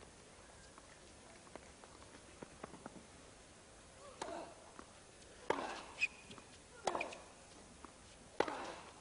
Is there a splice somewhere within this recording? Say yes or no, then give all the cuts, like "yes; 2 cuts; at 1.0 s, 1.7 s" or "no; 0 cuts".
no; 0 cuts